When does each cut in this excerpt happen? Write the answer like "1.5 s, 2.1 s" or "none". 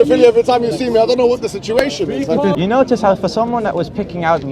2.5 s